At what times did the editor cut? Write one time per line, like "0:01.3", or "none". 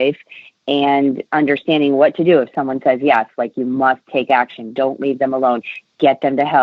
none

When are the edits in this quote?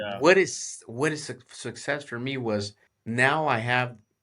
0:02.8

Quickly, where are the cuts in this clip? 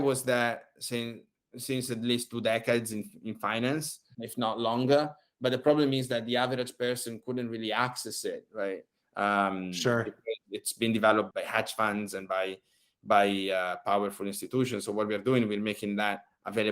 0:04.0
0:11.3

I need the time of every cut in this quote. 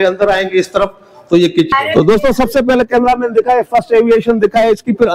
0:01.7

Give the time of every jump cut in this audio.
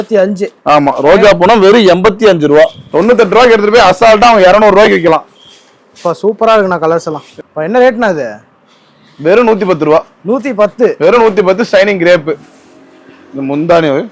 0:02.8
0:07.2
0:12.5

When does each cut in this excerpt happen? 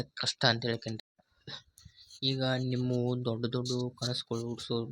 0:01.0

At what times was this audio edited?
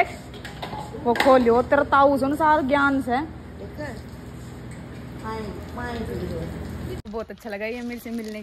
0:07.0

